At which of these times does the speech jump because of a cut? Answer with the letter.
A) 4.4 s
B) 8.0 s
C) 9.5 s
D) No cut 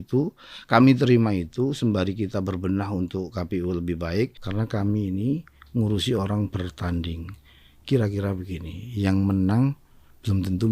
A